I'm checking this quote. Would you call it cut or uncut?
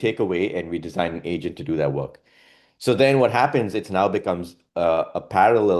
uncut